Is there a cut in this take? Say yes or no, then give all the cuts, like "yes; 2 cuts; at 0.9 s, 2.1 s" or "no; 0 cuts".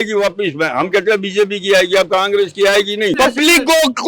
yes; 1 cut; at 3.2 s